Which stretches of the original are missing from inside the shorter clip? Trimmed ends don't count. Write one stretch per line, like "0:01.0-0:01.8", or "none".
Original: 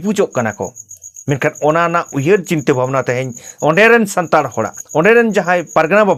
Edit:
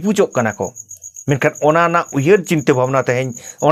none